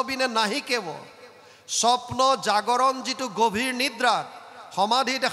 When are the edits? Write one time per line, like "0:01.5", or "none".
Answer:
none